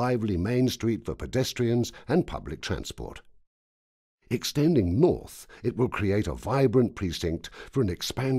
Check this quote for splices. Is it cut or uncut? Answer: cut